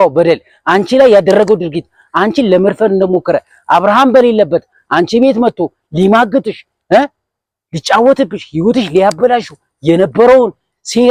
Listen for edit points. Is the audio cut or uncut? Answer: uncut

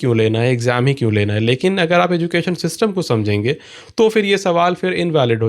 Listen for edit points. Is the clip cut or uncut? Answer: uncut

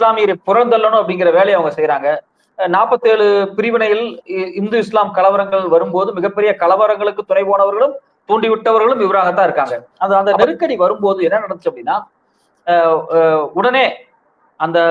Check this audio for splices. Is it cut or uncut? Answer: cut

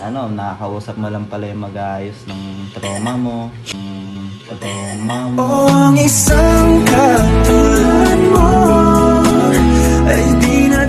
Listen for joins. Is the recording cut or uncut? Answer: uncut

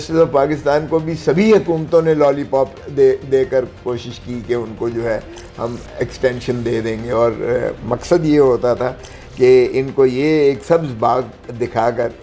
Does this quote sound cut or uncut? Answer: uncut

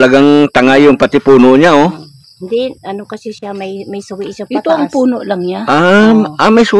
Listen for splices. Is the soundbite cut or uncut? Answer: uncut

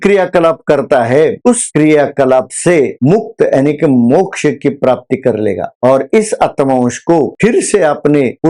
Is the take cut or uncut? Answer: uncut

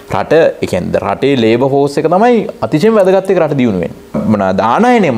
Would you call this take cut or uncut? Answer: cut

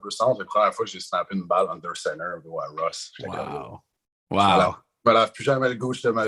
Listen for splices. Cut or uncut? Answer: uncut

